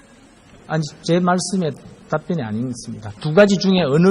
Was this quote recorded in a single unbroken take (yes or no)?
no